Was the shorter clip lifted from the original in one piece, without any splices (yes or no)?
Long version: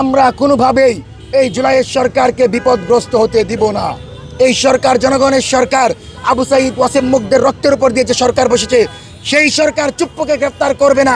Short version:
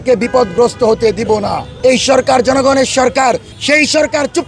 no